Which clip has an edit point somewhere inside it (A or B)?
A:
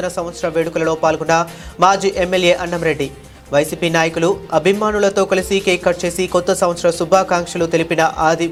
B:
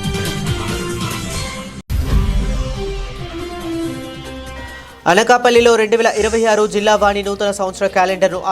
B